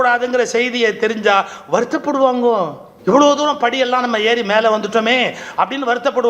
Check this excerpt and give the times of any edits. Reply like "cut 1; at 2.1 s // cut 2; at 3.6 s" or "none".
cut 1; at 2.8 s